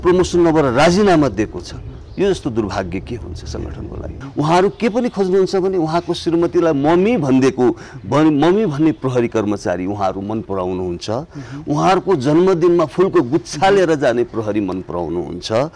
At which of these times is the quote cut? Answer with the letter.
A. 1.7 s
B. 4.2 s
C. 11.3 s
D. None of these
B